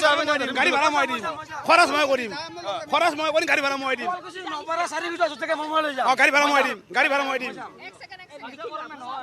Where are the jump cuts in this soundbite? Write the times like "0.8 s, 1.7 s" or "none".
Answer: none